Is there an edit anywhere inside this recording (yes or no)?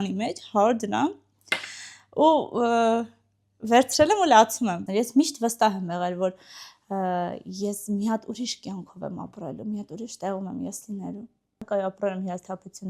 yes